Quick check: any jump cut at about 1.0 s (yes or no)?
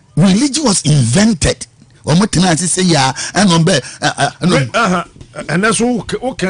no